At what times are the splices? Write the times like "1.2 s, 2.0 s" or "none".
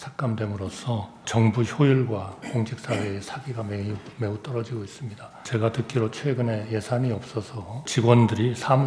1.3 s, 5.4 s, 7.9 s